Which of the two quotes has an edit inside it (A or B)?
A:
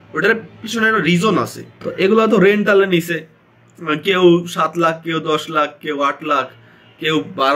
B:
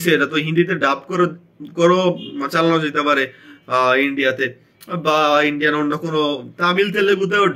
A